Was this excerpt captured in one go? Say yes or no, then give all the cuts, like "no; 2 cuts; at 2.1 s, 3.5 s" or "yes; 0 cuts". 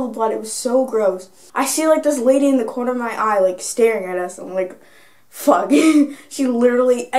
no; 1 cut; at 1.4 s